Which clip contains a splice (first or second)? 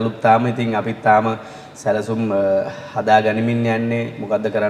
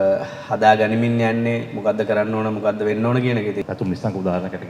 second